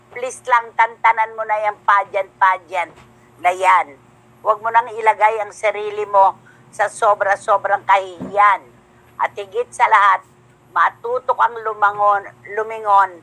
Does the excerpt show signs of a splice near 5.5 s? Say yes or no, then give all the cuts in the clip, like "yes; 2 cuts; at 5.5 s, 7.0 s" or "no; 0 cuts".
no; 0 cuts